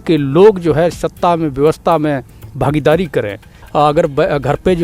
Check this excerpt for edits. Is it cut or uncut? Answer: cut